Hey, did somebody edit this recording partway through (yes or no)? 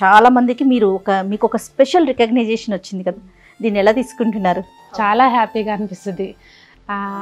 yes